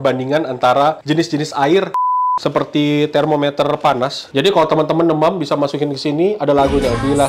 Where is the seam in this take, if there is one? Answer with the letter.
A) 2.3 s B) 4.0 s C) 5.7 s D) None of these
A